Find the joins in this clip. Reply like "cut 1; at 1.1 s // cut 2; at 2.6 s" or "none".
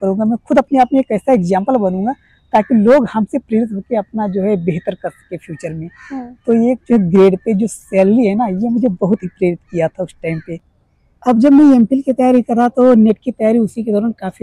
cut 1; at 10.5 s